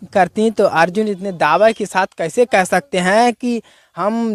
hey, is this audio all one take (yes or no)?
yes